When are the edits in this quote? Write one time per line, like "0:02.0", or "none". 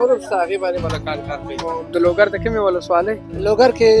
0:01.8